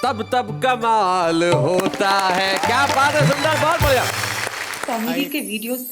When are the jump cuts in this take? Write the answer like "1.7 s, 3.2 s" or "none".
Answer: 4.7 s